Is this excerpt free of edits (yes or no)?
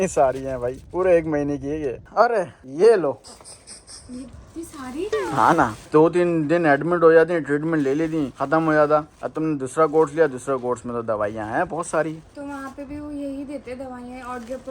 yes